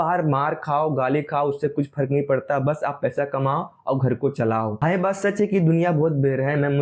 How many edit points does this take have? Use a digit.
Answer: 0